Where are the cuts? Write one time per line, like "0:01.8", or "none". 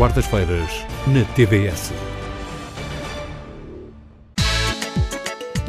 0:04.2